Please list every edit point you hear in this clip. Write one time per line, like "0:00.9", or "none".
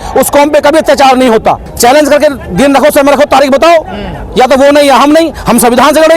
0:01.7